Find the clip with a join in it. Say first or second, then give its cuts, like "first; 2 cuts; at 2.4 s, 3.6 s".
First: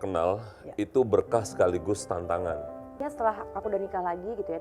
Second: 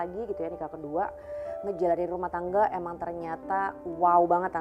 first; 1 cut; at 3.1 s